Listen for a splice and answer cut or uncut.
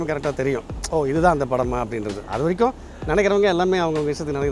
uncut